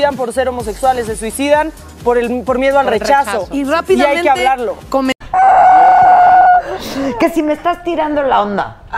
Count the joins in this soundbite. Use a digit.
1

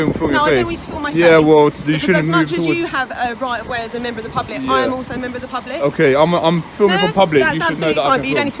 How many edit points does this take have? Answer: 0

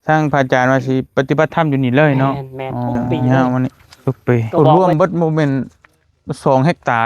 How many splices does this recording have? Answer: 1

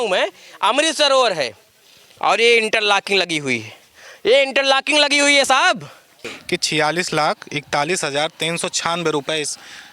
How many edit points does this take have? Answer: 1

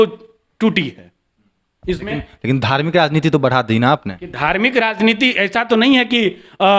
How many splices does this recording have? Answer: 0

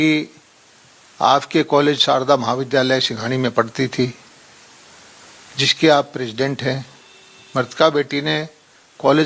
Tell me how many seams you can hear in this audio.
0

